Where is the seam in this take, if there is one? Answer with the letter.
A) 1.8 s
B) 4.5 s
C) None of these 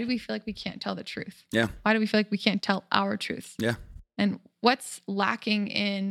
B